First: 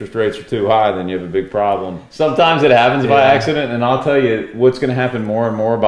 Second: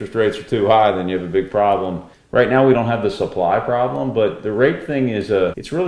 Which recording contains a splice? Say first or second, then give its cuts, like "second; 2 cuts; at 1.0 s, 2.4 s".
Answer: first; 1 cut; at 2.1 s